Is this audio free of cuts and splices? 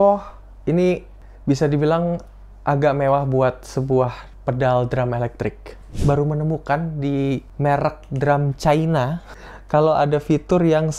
no; 3 cuts; at 5.9 s, 7.5 s, 9.3 s

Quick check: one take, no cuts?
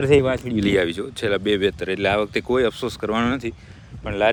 yes; 0 cuts

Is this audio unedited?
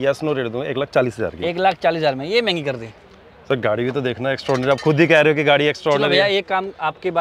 yes; 0 cuts

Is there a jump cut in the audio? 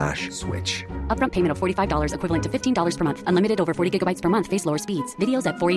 no; 0 cuts

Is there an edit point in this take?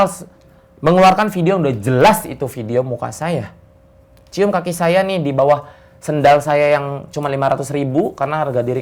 no; 0 cuts

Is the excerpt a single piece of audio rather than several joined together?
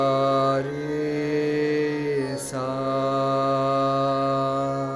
yes; 0 cuts

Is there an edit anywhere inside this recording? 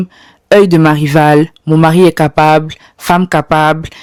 no; 0 cuts

